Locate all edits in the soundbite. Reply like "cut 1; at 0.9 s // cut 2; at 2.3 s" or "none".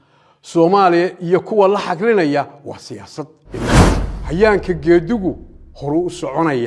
cut 1; at 3.8 s